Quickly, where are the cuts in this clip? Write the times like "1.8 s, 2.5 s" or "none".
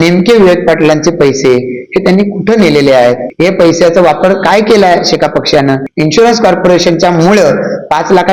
3.3 s, 5.9 s